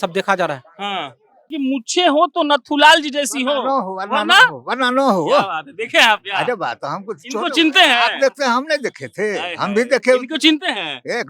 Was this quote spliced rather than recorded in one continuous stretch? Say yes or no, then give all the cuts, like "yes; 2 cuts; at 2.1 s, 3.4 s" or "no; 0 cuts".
yes; 1 cut; at 1.5 s